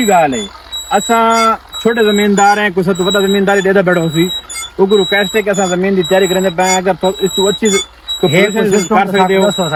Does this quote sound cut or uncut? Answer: uncut